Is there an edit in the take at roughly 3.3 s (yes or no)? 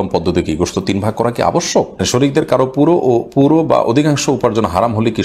no